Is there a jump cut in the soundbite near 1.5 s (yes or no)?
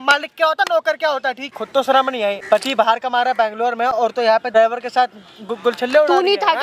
yes